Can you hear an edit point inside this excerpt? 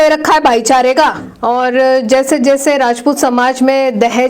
yes; 1 cut; at 1.3 s

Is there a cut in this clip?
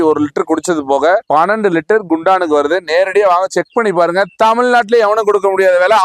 no; 0 cuts

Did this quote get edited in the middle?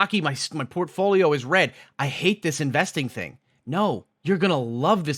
yes; 1 cut; at 4.1 s

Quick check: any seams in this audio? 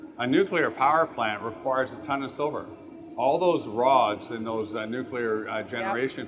no; 0 cuts

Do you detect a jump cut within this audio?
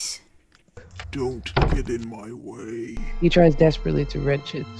yes; 2 cuts; at 1.0 s, 3.0 s

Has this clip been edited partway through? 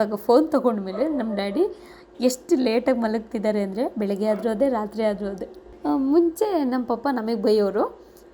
yes; 1 cut; at 5.8 s

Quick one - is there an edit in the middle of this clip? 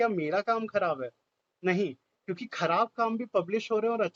no; 0 cuts

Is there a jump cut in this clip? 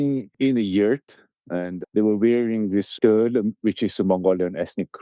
yes; 2 cuts; at 1.8 s, 2.9 s

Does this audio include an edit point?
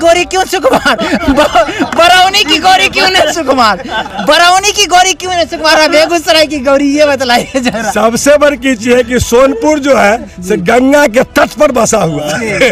no; 0 cuts

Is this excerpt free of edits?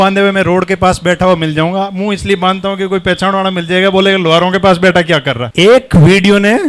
yes; 0 cuts

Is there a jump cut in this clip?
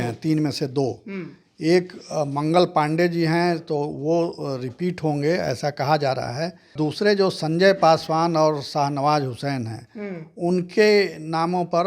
yes; 1 cut; at 6.7 s

